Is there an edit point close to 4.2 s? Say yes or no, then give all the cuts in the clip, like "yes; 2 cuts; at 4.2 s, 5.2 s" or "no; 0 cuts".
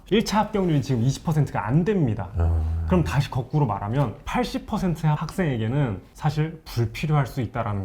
yes; 3 cuts; at 4.2 s, 5.2 s, 6.1 s